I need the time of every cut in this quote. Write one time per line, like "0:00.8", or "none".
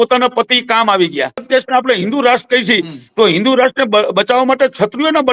0:01.5